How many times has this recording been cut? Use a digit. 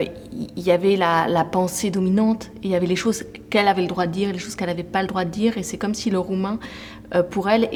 0